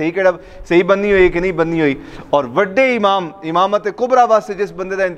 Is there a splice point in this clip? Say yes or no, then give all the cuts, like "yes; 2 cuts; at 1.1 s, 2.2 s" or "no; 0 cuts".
no; 0 cuts